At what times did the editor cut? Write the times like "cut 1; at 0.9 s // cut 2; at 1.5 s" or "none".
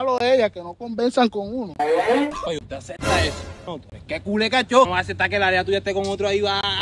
cut 1; at 2.5 s // cut 2; at 3.6 s // cut 3; at 4.9 s